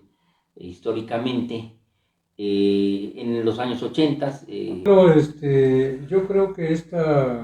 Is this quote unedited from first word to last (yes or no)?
no